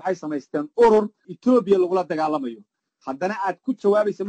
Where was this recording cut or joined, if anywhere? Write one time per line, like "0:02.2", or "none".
0:01.2